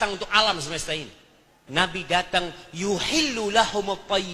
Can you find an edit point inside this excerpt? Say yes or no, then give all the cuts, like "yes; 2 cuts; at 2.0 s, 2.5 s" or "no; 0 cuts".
yes; 1 cut; at 1.6 s